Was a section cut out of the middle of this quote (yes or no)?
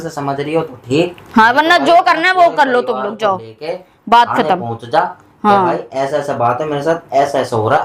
no